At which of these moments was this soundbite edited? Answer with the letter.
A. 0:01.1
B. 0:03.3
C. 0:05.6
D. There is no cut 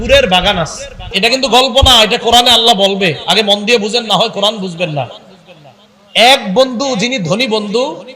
A